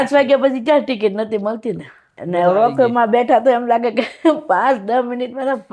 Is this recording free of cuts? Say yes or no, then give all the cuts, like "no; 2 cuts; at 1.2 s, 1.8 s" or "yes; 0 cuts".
no; 1 cut; at 2.1 s